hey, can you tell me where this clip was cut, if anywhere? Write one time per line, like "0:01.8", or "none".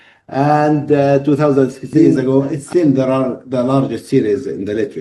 0:02.1